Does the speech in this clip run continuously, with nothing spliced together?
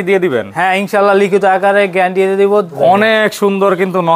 no; 1 cut; at 2.7 s

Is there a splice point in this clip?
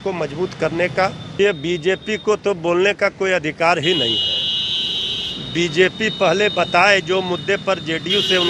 yes; 1 cut; at 1.3 s

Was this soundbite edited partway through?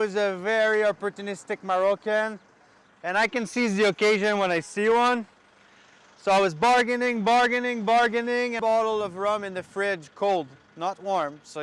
no; 0 cuts

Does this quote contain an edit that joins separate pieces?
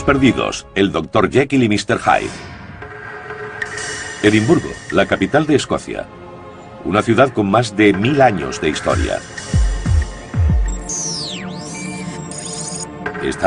yes; 1 cut; at 10.5 s

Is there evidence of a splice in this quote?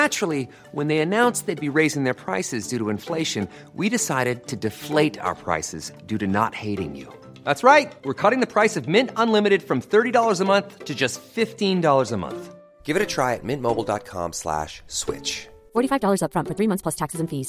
no; 0 cuts

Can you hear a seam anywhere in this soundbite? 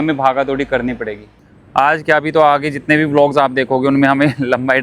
yes; 1 cut; at 1.3 s

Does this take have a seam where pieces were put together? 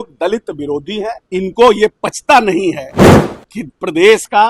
yes; 1 cut; at 1.2 s

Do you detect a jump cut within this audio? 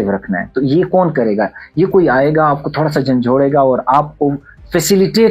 no; 0 cuts

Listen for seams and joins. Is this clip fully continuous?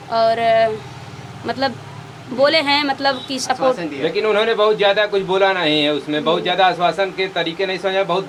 yes; 0 cuts

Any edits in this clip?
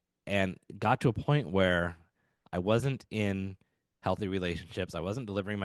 no; 0 cuts

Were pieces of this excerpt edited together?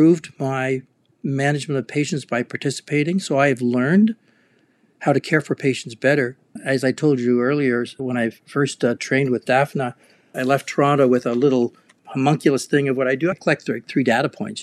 no; 0 cuts

